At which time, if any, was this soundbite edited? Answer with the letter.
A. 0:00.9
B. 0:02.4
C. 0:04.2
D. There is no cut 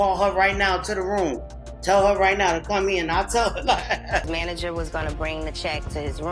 C